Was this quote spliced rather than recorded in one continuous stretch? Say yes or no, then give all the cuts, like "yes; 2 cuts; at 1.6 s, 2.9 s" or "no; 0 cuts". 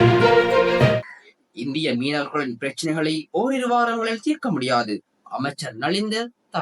yes; 1 cut; at 1.0 s